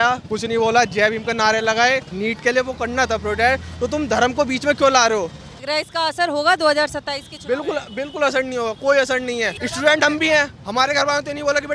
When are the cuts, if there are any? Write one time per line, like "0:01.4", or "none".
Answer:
0:02.1
0:05.6
0:09.6